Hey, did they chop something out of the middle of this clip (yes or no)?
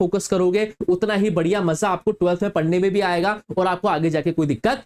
no